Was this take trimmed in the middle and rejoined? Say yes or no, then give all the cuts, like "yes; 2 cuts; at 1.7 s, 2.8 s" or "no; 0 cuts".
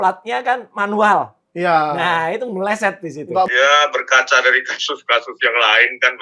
yes; 1 cut; at 3.5 s